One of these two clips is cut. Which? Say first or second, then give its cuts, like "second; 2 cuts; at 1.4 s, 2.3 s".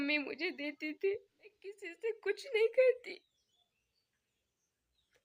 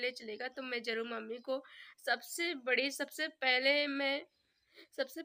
first; 1 cut; at 1.9 s